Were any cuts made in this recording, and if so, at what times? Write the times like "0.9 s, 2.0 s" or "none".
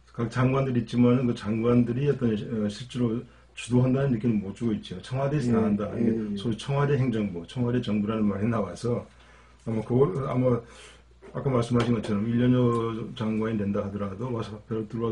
none